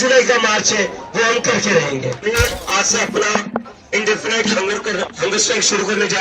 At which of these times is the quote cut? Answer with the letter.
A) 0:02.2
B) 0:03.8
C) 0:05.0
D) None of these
A